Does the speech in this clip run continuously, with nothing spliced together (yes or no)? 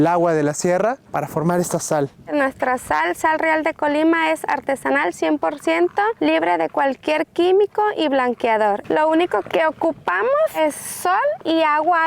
no